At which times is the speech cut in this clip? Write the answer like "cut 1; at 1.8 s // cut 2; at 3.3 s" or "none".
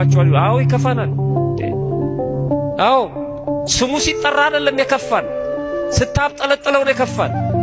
none